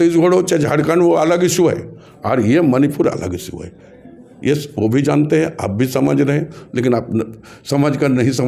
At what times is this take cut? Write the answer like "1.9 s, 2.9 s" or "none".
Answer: none